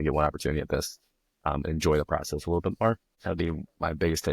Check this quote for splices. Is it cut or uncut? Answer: cut